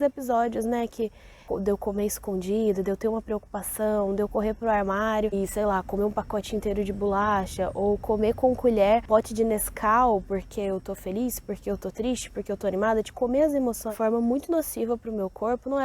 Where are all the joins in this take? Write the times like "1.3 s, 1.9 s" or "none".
1.4 s, 5.3 s, 9.0 s, 13.9 s